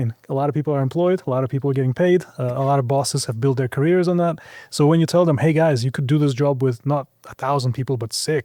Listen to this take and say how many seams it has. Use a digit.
0